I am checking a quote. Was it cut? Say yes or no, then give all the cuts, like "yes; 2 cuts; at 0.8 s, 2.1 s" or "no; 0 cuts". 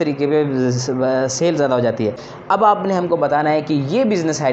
yes; 1 cut; at 2.3 s